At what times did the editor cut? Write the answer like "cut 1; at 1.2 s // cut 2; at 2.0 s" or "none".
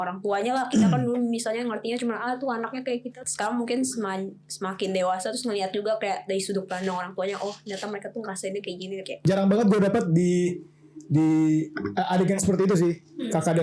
cut 1; at 3.2 s // cut 2; at 9.2 s